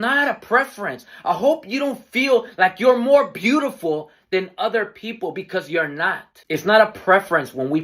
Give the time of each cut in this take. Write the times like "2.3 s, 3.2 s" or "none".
6.6 s

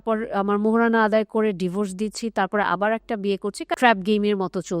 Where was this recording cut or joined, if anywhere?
3.7 s

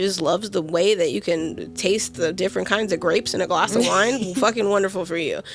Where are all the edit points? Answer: none

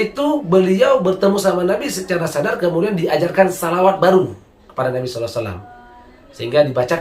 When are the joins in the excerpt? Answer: none

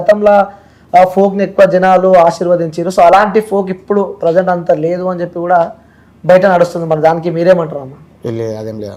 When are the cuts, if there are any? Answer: none

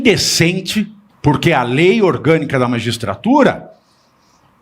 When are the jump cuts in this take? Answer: 1.0 s

